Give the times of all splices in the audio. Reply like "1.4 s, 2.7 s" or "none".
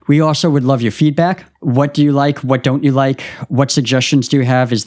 none